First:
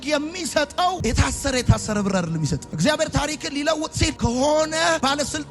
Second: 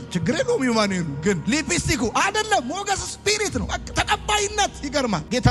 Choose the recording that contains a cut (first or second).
first